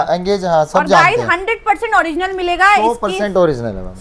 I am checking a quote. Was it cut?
no; 0 cuts

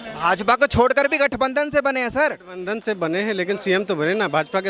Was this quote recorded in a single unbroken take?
yes; 0 cuts

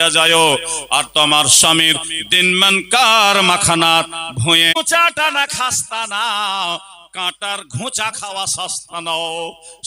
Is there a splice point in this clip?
yes; 1 cut; at 4.8 s

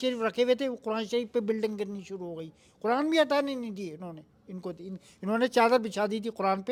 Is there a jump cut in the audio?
no; 0 cuts

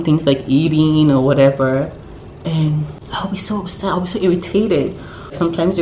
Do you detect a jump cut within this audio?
yes; 1 cut; at 3.0 s

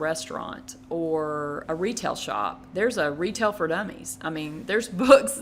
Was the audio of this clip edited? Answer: yes; 2 cuts; at 1.6 s, 2.6 s

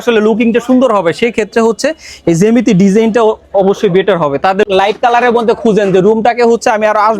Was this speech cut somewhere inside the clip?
no; 0 cuts

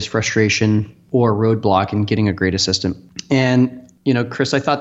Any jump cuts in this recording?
yes; 3 cuts; at 1.0 s, 3.1 s, 3.9 s

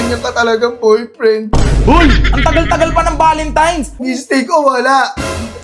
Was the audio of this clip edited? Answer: yes; 1 cut; at 4.0 s

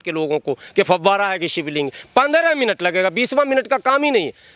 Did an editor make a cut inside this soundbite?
no; 0 cuts

